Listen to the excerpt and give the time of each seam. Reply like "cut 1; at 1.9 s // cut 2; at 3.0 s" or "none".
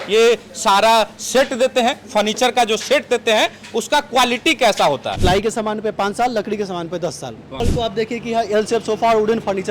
cut 1; at 5.1 s // cut 2; at 7.4 s